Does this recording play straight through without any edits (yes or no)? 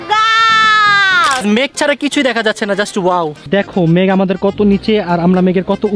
no